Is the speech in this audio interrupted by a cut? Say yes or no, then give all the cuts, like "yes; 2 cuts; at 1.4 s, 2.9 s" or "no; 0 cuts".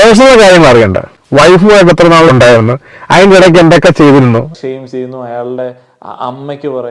yes; 1 cut; at 4.5 s